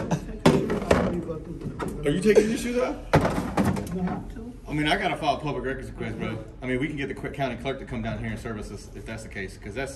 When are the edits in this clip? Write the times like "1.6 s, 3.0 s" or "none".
none